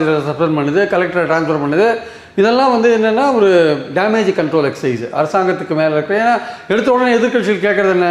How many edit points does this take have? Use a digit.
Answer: 0